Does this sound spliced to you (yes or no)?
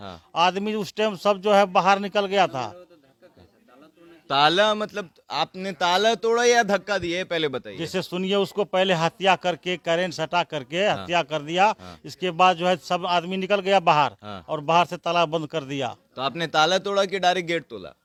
no